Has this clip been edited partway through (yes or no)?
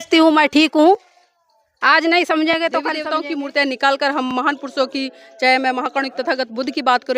yes